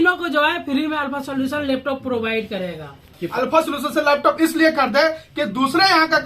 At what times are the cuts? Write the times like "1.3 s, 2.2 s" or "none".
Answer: 3.3 s